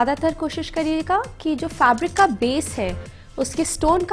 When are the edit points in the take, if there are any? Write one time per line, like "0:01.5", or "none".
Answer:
none